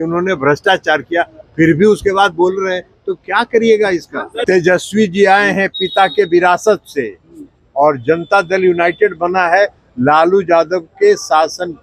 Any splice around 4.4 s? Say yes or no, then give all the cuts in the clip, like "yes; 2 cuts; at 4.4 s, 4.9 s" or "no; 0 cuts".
yes; 1 cut; at 4.4 s